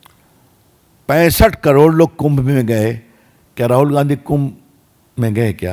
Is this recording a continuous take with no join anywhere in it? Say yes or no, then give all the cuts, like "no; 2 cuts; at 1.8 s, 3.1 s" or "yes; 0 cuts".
yes; 0 cuts